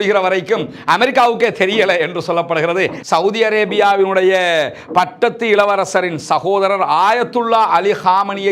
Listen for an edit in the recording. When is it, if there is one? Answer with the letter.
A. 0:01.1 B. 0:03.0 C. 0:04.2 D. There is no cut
B